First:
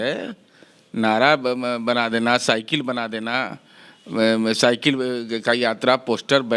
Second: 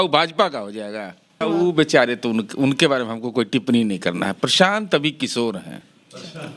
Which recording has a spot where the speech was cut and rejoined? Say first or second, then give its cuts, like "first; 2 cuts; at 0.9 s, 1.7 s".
second; 1 cut; at 1.3 s